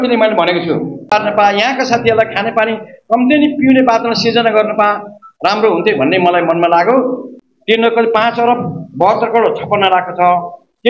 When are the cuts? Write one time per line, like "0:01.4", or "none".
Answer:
0:01.1
0:07.3